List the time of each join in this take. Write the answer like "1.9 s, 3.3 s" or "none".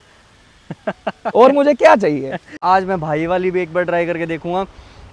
2.6 s